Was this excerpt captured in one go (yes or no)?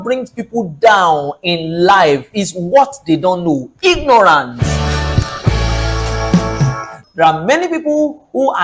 no